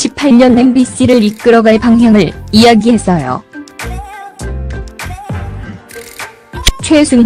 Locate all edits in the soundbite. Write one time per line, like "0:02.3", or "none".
none